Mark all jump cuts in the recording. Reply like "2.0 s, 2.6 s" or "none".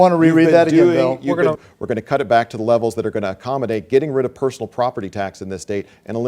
1.6 s